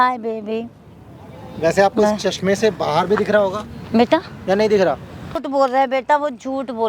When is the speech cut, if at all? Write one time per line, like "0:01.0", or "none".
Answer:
0:05.3